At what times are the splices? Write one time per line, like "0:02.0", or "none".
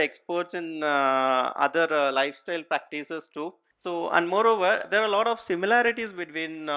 0:03.7